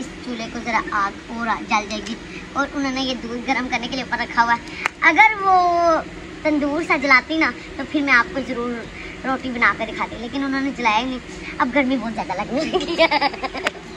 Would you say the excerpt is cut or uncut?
uncut